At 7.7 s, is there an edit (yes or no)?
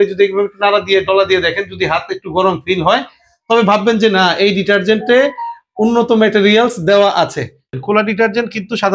yes